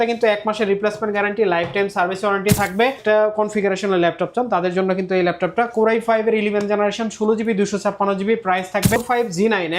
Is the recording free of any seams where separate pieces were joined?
no; 2 cuts; at 3.0 s, 9.0 s

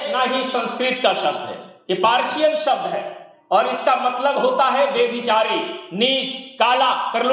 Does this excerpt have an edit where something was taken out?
no; 0 cuts

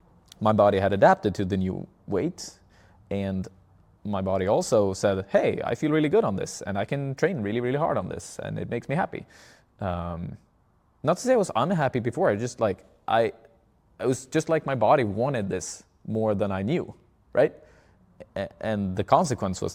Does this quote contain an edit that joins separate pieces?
no; 0 cuts

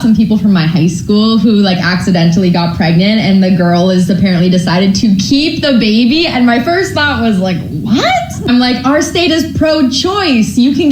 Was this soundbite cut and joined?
yes; 2 cuts; at 5.6 s, 9.6 s

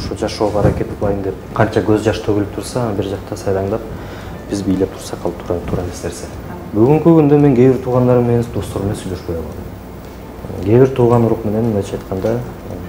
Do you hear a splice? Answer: yes; 3 cuts; at 1.4 s, 6.6 s, 10.3 s

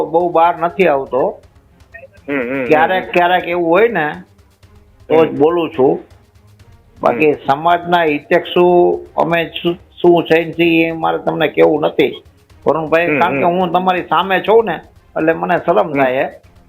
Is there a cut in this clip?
no; 0 cuts

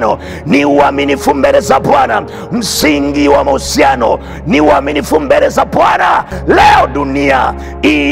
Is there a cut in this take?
yes; 1 cut; at 6.3 s

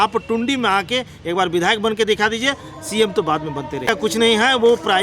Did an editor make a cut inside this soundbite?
yes; 1 cut; at 4.0 s

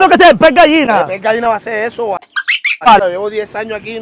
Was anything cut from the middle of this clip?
yes; 1 cut; at 2.9 s

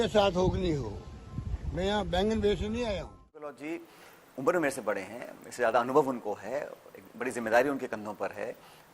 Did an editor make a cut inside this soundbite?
yes; 1 cut; at 3.6 s

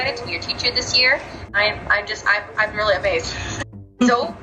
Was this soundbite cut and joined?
yes; 1 cut; at 1.5 s

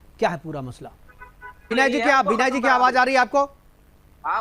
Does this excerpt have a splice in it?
yes; 1 cut; at 1.7 s

